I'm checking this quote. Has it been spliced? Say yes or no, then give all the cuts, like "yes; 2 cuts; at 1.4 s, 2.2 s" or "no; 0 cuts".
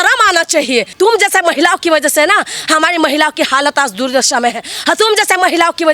yes; 1 cut; at 0.9 s